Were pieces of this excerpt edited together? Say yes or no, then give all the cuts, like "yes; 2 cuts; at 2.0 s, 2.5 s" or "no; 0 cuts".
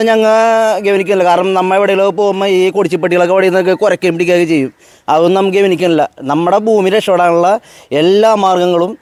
no; 0 cuts